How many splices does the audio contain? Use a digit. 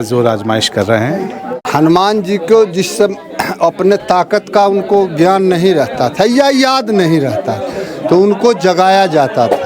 1